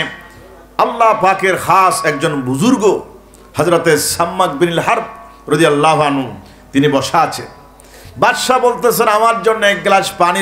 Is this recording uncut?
yes; 0 cuts

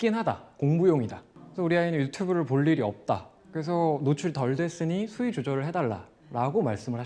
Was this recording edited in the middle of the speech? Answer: no; 0 cuts

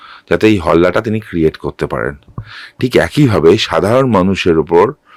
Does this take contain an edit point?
no; 0 cuts

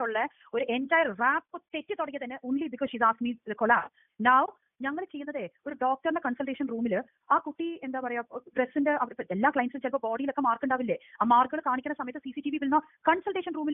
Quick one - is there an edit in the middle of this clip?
no; 0 cuts

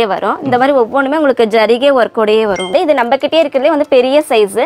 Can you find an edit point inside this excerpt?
yes; 1 cut; at 2.7 s

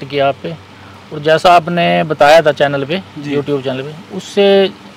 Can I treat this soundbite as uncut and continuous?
yes; 0 cuts

